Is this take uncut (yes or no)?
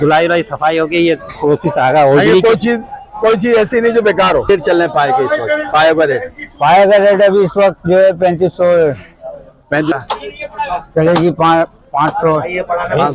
no